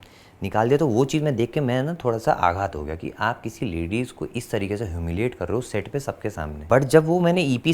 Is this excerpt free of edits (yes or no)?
no